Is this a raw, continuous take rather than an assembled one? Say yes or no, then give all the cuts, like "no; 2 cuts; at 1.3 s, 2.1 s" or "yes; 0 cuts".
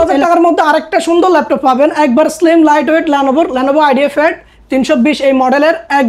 yes; 0 cuts